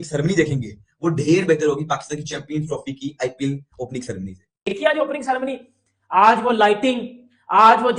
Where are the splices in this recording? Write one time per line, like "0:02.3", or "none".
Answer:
0:04.5